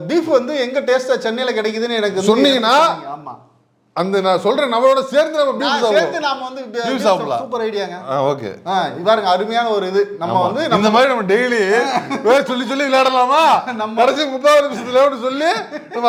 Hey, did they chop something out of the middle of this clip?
no; 0 cuts

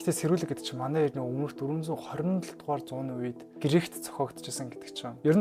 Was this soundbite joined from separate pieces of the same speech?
no; 0 cuts

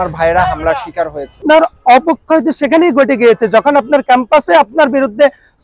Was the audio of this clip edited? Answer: yes; 1 cut; at 1.4 s

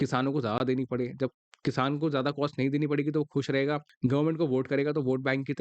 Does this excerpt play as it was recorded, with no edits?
no; 1 cut; at 3.9 s

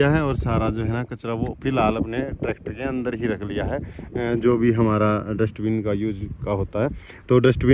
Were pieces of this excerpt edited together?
no; 0 cuts

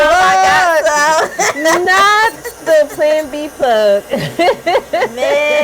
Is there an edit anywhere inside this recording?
no; 0 cuts

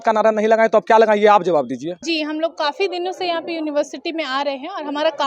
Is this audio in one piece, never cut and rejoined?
no; 1 cut; at 1.9 s

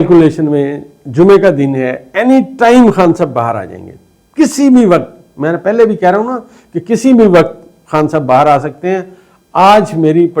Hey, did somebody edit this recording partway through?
no; 0 cuts

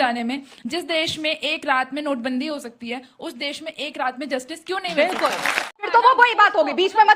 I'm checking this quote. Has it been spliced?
yes; 1 cut; at 5.8 s

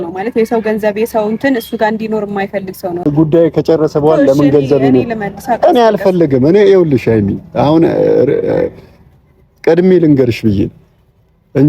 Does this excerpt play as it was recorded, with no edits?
no; 1 cut; at 3.1 s

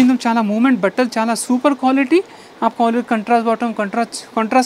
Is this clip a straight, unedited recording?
yes; 0 cuts

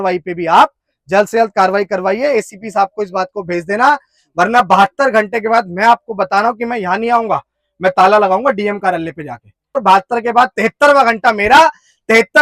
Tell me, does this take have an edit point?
yes; 1 cut; at 9.8 s

